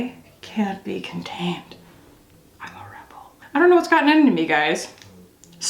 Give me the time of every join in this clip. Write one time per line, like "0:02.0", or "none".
0:03.4